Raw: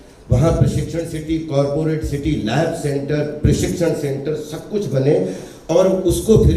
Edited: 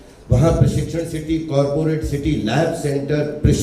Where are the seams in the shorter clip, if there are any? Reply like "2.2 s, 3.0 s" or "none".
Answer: none